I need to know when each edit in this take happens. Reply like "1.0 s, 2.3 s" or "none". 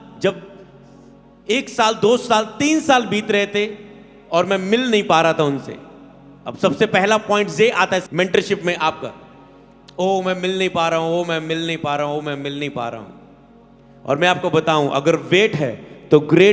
8.0 s